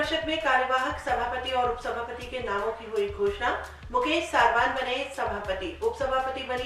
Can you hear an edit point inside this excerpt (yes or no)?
no